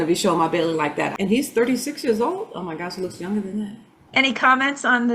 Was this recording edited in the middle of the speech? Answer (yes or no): yes